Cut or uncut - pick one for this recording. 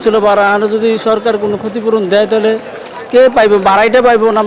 uncut